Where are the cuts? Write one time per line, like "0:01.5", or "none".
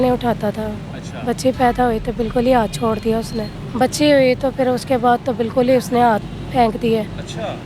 0:03.4